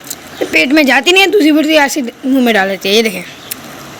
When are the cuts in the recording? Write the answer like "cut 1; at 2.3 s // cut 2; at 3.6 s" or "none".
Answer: none